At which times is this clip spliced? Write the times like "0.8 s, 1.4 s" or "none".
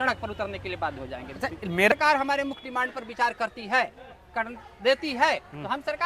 1.9 s